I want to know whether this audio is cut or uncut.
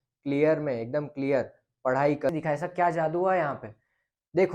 cut